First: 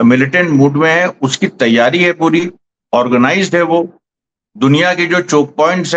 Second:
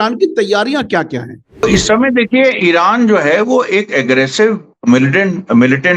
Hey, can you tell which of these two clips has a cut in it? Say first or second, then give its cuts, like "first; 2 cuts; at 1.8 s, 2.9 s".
second; 1 cut; at 1.6 s